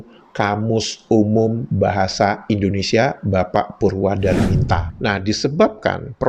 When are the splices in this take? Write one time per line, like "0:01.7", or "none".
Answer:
0:04.9